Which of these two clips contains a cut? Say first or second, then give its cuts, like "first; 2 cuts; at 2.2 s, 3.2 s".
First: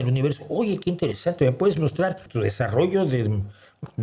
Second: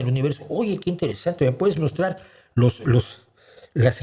first; 1 cut; at 2.2 s